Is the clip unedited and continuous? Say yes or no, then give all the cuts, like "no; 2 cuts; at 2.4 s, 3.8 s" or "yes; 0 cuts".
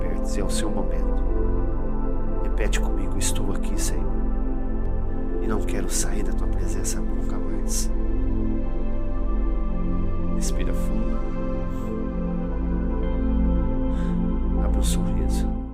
yes; 0 cuts